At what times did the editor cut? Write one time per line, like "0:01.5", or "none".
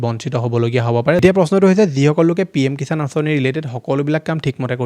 0:01.2